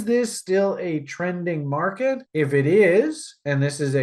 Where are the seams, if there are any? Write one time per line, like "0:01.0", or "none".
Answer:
none